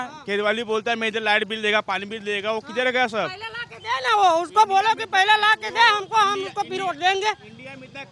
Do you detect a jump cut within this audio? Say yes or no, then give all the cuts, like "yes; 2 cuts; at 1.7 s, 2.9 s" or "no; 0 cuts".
no; 0 cuts